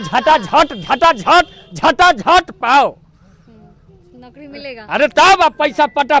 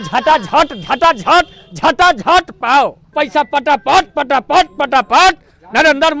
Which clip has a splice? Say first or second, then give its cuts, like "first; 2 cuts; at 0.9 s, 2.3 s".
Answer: second; 1 cut; at 3.1 s